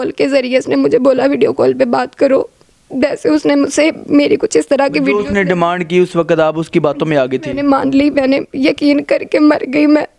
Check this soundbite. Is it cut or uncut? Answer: uncut